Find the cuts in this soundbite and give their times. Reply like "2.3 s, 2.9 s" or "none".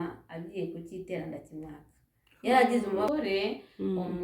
3.1 s